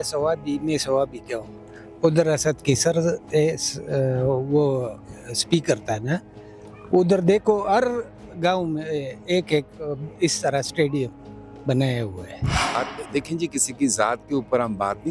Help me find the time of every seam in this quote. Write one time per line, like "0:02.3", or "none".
none